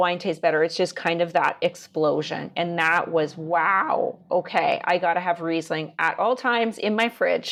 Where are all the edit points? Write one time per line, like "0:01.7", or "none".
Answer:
none